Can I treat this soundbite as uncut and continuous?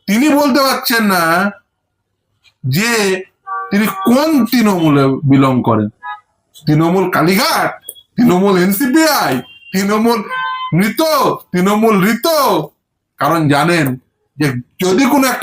yes; 0 cuts

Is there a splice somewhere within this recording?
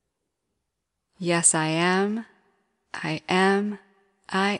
yes; 1 cut; at 0.9 s

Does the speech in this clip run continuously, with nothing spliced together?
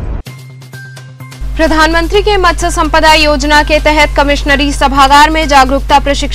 no; 1 cut; at 1.3 s

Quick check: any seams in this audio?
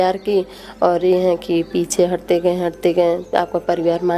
no; 0 cuts

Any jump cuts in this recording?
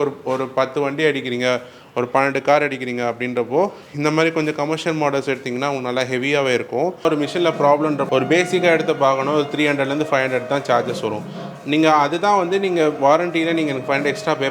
yes; 2 cuts; at 7.0 s, 8.1 s

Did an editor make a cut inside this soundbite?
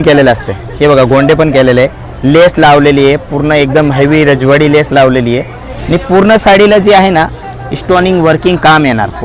no; 0 cuts

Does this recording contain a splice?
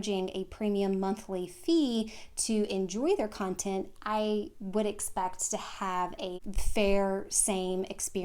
yes; 1 cut; at 6.4 s

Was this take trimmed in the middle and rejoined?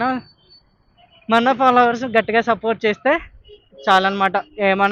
no; 0 cuts

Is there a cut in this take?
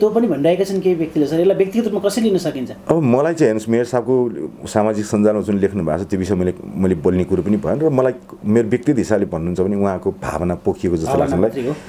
no; 0 cuts

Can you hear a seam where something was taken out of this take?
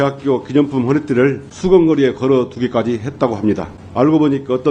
yes; 2 cuts; at 1.5 s, 3.8 s

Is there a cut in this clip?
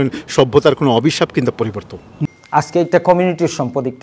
yes; 1 cut; at 2.1 s

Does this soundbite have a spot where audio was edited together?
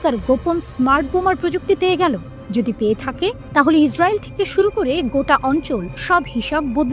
no; 0 cuts

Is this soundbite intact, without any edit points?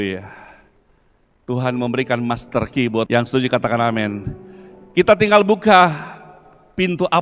no; 1 cut; at 3.1 s

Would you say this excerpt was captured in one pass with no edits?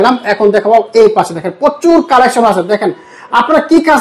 yes; 0 cuts

